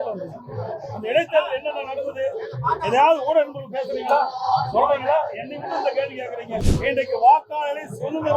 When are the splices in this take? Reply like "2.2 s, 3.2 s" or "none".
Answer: 6.7 s